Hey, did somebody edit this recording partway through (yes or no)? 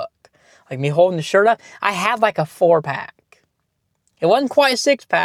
no